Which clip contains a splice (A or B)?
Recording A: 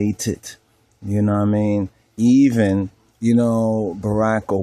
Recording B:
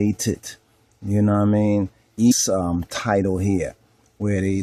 A